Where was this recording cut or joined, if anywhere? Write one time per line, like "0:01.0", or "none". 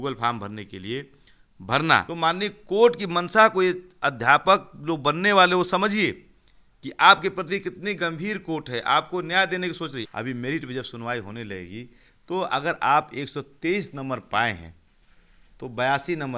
0:02.1
0:10.0

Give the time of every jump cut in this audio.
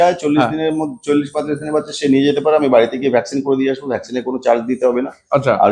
none

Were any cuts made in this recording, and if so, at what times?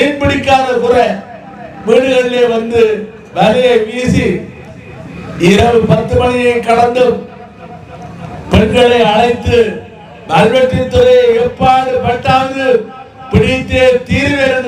none

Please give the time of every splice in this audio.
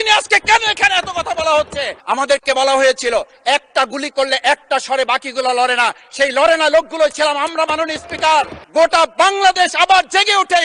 0:01.9
0:08.6

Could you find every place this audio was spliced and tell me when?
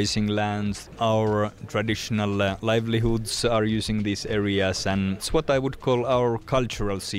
0:00.8
0:05.2

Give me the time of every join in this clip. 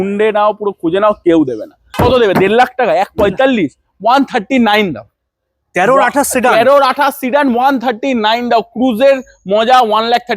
0:01.8

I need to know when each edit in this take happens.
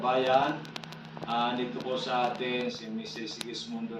0:01.8

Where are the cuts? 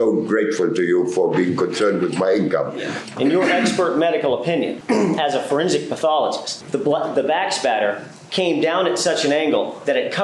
0:03.0
0:04.8
0:06.5

